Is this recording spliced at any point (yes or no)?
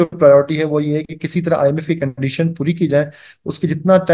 no